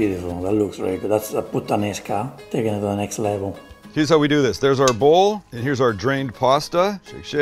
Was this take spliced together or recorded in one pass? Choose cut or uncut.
cut